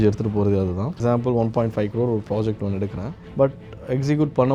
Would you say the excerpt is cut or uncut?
cut